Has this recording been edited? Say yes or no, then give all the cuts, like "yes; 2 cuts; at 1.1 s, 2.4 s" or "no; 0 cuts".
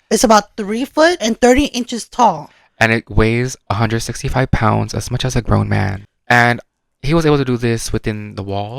yes; 2 cuts; at 1.2 s, 6.4 s